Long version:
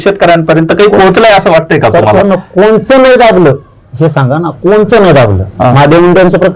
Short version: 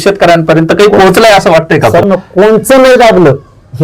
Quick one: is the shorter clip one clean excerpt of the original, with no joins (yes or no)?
no